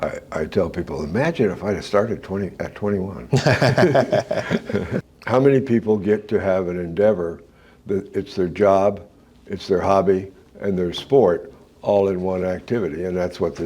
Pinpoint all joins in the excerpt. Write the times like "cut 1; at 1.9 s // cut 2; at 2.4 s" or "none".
cut 1; at 4.9 s